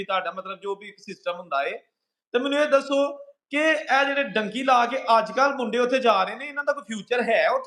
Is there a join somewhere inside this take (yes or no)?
no